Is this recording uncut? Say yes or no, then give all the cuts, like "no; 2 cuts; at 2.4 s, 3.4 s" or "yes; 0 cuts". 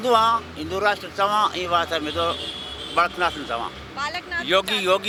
yes; 0 cuts